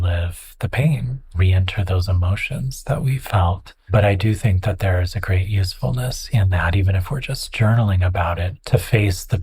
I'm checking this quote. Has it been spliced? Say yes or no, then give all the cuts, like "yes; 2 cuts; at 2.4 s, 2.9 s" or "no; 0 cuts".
yes; 2 cuts; at 3.7 s, 8.5 s